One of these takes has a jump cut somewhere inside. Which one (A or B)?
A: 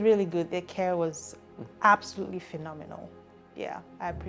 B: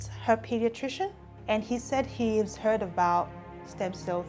B